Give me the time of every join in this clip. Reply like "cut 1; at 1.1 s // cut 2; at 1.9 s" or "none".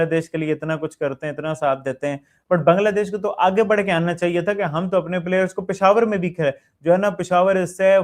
none